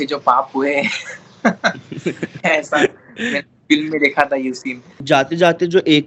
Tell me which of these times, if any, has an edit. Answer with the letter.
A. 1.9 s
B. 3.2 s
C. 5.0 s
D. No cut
C